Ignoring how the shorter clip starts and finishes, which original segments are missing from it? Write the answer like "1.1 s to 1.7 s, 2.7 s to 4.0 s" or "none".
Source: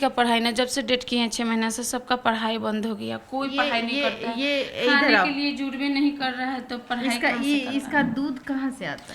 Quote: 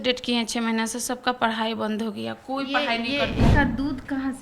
4.3 s to 7.9 s